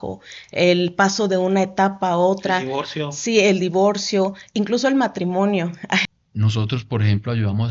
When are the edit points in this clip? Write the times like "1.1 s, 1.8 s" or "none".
6.0 s